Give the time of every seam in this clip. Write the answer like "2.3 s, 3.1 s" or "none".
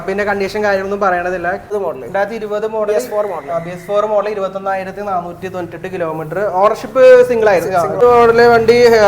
1.7 s, 8.0 s